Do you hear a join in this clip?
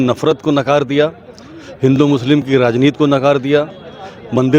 no; 0 cuts

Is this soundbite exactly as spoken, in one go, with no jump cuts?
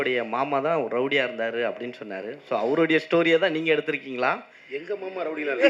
yes; 0 cuts

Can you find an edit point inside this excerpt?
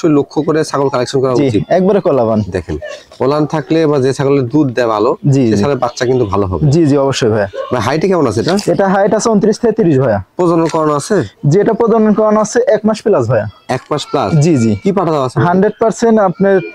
no; 0 cuts

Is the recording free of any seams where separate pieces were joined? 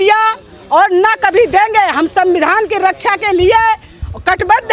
yes; 0 cuts

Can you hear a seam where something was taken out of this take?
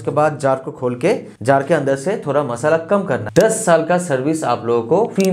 yes; 1 cut; at 3.3 s

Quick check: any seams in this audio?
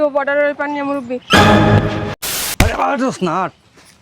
yes; 1 cut; at 2.1 s

